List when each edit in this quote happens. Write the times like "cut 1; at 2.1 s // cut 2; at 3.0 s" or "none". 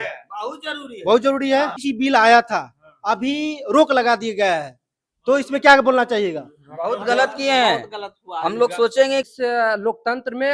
cut 1; at 1.8 s // cut 2; at 9.3 s